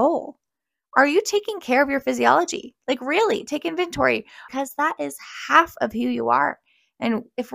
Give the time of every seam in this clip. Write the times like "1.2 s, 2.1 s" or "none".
4.4 s